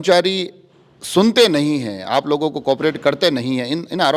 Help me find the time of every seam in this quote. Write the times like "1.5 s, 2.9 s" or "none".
none